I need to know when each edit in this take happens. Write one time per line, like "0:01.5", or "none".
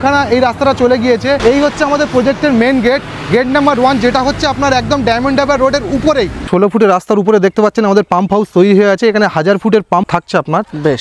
0:01.4
0:06.5
0:10.1